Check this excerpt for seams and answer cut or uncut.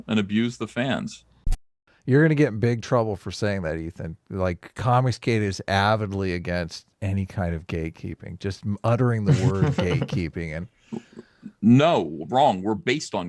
cut